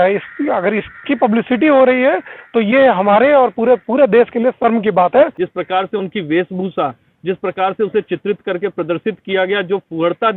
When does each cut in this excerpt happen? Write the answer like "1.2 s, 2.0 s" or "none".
5.4 s

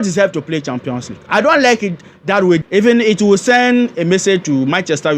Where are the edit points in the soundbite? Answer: 2.7 s

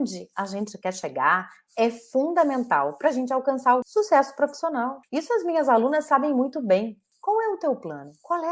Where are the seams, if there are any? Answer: 3.9 s, 5.0 s, 7.0 s

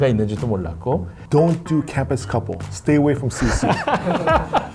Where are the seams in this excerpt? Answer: 1.1 s

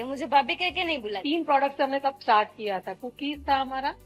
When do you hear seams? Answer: 1.2 s

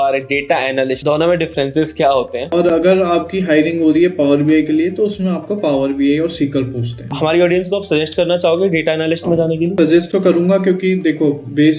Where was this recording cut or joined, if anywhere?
1.0 s, 2.6 s, 7.0 s, 10.1 s

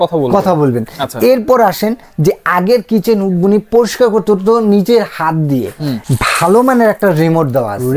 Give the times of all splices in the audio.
5.9 s

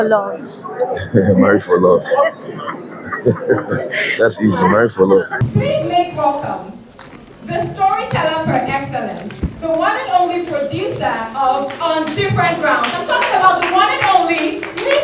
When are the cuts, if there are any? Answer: none

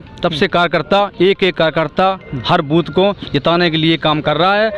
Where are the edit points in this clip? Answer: none

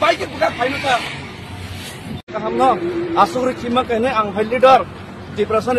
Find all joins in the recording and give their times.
2.3 s

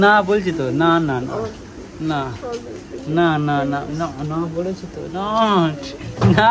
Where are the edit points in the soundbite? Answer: none

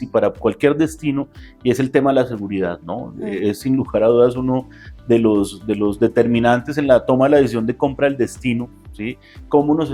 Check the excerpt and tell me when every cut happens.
none

